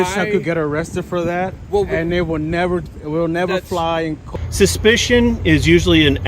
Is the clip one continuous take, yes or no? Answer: no